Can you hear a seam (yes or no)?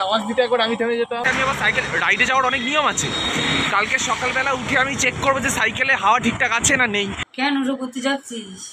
yes